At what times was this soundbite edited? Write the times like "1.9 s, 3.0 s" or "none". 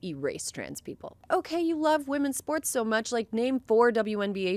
1.2 s